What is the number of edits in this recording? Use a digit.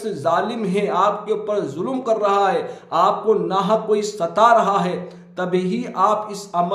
0